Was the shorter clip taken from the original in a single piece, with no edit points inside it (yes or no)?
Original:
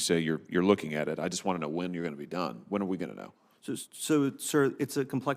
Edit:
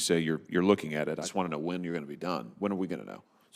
no